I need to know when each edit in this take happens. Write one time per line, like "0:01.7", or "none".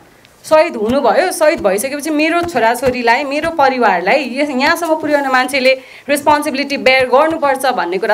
none